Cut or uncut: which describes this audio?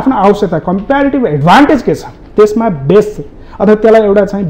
uncut